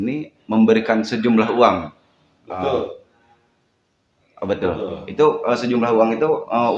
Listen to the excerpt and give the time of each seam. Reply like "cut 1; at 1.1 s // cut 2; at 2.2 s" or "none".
none

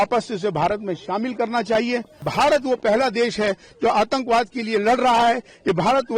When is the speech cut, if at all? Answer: cut 1; at 2.2 s

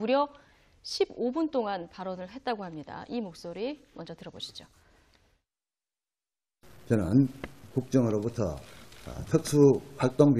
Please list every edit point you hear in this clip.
none

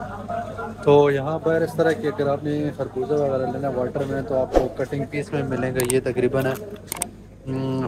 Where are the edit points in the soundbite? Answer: none

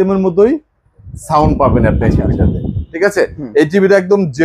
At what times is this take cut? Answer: none

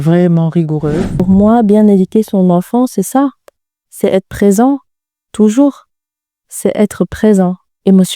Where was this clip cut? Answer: cut 1; at 1.1 s

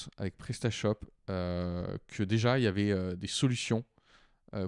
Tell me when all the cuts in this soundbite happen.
none

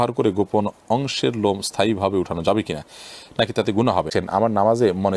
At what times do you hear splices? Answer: cut 1; at 4.1 s

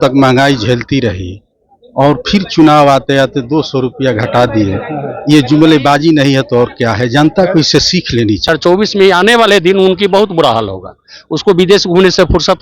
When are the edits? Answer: cut 1; at 8.5 s

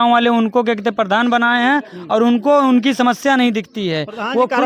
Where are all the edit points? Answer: none

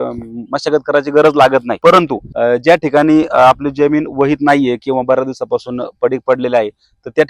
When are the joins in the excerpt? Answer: cut 1; at 2.0 s

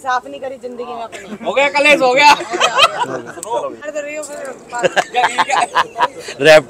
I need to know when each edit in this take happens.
cut 1; at 3.8 s

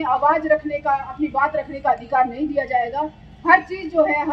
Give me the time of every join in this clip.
none

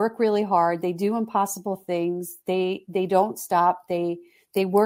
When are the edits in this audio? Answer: none

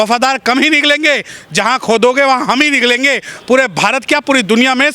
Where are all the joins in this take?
none

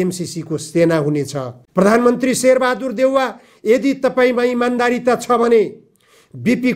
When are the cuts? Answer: cut 1; at 1.5 s

